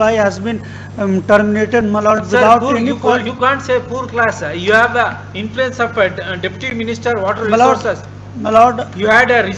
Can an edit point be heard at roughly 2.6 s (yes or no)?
no